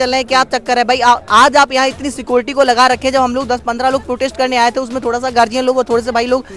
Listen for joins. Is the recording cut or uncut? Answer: uncut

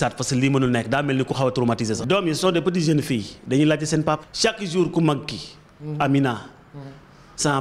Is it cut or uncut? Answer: cut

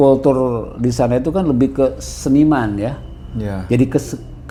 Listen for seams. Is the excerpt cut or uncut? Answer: uncut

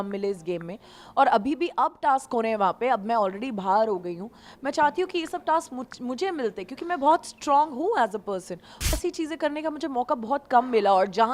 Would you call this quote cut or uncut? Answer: cut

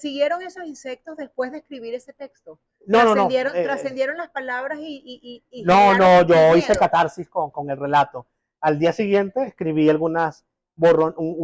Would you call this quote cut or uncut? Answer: uncut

